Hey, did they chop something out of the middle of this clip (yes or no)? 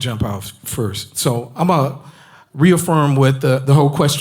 no